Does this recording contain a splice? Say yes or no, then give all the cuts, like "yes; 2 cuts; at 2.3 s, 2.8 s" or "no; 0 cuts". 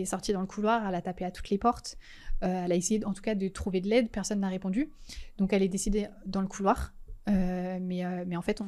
no; 0 cuts